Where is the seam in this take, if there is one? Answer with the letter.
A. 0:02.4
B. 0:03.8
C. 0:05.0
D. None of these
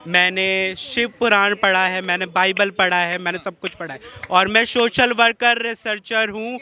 D